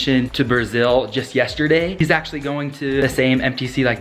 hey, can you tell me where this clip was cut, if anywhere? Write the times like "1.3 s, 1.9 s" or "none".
none